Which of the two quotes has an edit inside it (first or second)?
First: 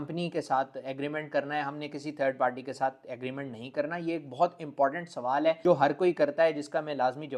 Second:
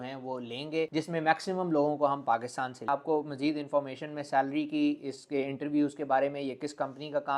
second